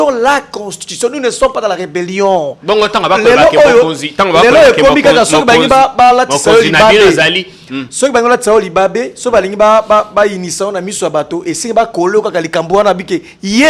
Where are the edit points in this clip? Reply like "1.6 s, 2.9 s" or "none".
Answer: none